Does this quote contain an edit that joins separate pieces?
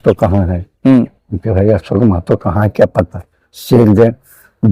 no; 0 cuts

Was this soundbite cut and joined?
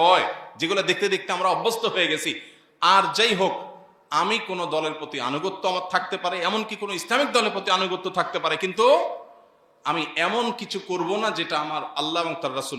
no; 0 cuts

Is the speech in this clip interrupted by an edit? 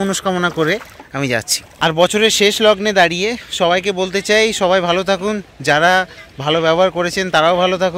no; 0 cuts

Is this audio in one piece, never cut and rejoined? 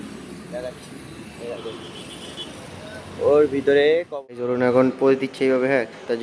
no; 1 cut; at 4.0 s

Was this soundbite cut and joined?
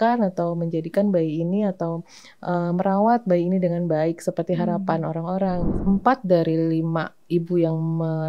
yes; 1 cut; at 5.8 s

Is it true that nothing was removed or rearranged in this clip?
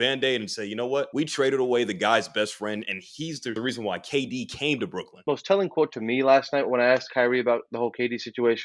no; 3 cuts; at 1.1 s, 3.7 s, 5.0 s

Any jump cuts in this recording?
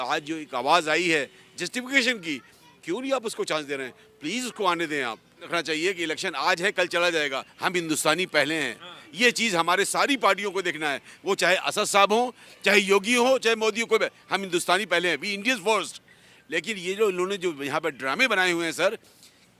yes; 1 cut; at 5.4 s

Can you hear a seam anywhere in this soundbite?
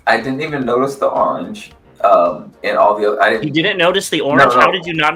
no; 0 cuts

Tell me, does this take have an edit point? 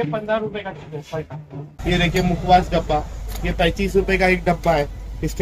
yes; 1 cut; at 2.0 s

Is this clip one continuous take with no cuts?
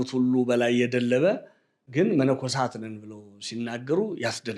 yes; 0 cuts

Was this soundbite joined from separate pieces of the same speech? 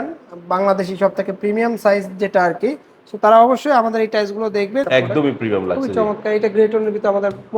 yes; 1 cut; at 4.8 s

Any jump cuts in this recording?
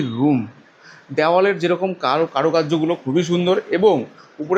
no; 0 cuts

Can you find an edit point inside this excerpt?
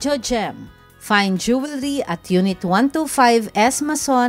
no; 0 cuts

